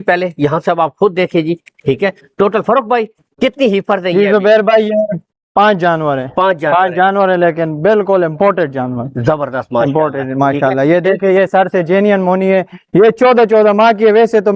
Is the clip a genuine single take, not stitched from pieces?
yes; 0 cuts

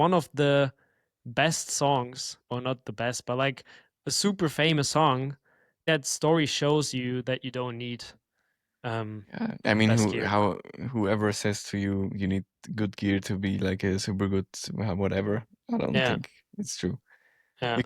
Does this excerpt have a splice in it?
yes; 1 cut; at 5.8 s

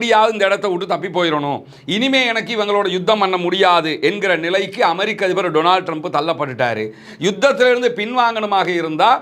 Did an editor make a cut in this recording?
no; 0 cuts

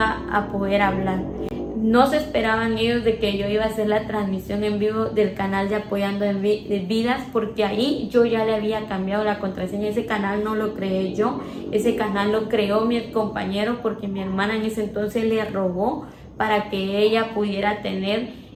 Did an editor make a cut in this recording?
no; 0 cuts

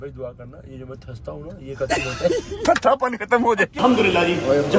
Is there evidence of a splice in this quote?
yes; 1 cut; at 3.8 s

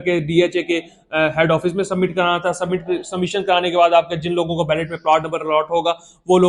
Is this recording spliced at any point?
no; 0 cuts

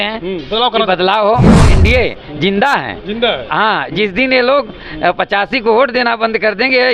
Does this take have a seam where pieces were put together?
yes; 1 cut; at 1.6 s

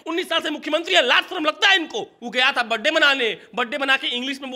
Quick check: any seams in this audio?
yes; 1 cut; at 2.2 s

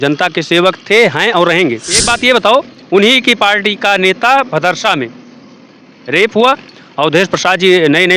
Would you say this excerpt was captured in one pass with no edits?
no; 1 cut; at 2.0 s

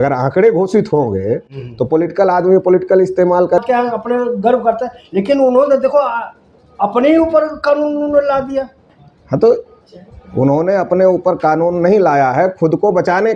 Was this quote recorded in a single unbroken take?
no; 1 cut; at 3.6 s

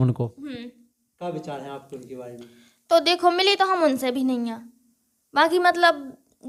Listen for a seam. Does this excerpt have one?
no; 0 cuts

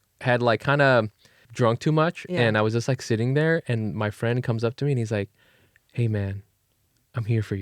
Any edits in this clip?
yes; 1 cut; at 1.4 s

